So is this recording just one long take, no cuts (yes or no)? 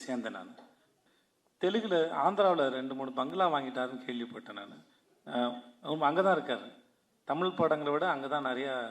no